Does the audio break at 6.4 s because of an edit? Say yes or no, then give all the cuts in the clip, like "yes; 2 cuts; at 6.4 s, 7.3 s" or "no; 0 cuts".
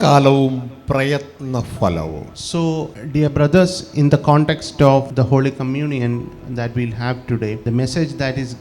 no; 4 cuts; at 2.3 s, 3.0 s, 5.1 s, 7.6 s